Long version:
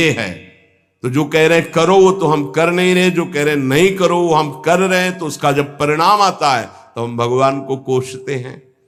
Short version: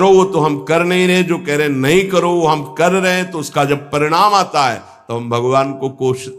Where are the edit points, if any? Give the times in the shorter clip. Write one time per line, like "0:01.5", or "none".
none